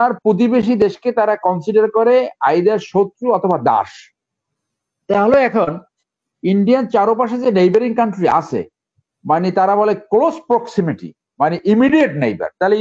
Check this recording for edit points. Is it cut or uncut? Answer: uncut